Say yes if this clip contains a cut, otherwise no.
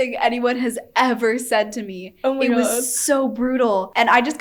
no